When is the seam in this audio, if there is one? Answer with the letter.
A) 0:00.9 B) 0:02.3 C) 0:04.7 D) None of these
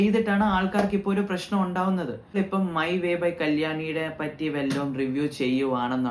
B